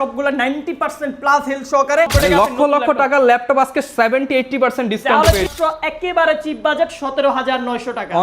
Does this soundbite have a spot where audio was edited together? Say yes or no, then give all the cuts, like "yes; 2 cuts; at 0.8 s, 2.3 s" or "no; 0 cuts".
yes; 2 cuts; at 2.1 s, 5.5 s